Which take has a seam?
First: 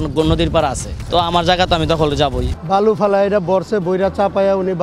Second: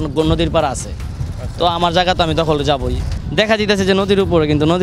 first; 2 cuts; at 0.9 s, 2.5 s

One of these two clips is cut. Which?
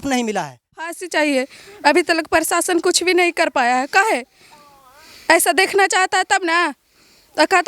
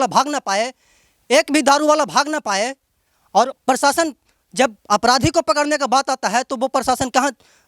first; 1 cut; at 0.9 s

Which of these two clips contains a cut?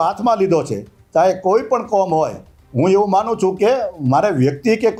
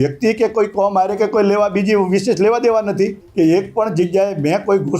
second; 1 cut; at 3.2 s

